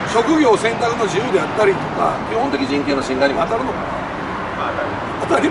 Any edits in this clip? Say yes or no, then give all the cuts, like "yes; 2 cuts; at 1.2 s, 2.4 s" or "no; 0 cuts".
no; 0 cuts